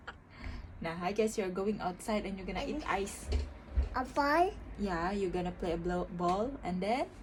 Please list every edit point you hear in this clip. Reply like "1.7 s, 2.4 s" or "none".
none